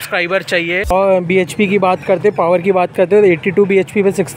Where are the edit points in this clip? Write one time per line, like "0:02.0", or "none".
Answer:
0:00.9